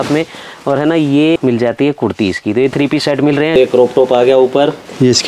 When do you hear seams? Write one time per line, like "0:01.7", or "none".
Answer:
0:01.4
0:03.6